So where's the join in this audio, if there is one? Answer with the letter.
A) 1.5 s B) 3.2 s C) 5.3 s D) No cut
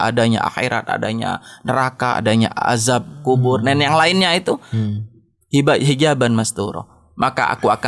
D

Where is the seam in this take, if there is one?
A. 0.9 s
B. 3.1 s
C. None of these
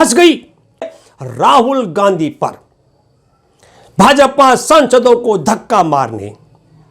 A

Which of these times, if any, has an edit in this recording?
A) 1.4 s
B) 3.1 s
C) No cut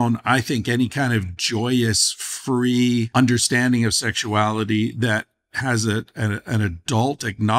B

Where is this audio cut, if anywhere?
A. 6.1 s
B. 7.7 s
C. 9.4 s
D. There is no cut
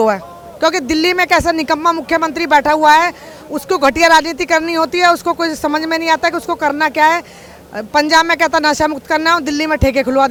D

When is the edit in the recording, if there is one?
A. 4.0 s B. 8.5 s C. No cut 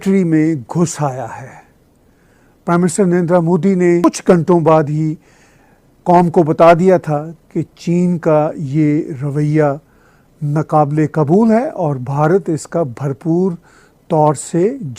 A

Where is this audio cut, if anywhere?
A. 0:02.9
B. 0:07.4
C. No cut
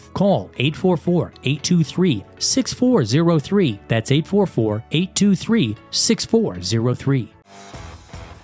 B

